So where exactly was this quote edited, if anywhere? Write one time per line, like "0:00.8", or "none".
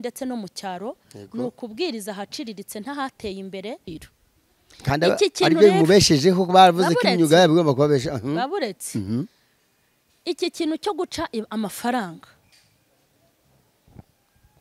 0:03.8